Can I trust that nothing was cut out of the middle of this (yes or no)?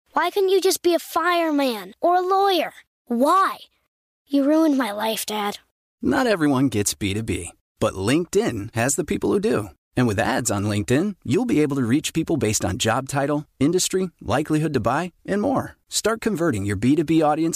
yes